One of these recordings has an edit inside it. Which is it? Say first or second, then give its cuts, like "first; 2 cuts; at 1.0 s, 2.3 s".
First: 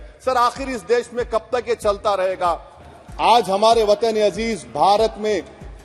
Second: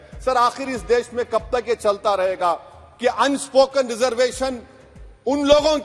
first; 1 cut; at 2.8 s